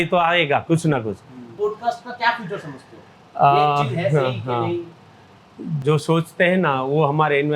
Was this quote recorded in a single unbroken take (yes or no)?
no